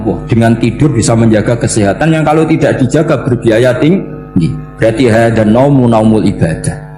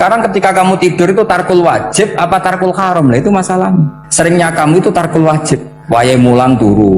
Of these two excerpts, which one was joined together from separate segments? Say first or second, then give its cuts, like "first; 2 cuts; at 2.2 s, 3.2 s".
second; 2 cuts; at 4.0 s, 5.7 s